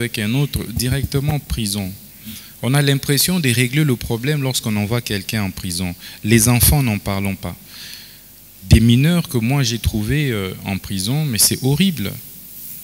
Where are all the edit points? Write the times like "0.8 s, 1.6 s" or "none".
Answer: none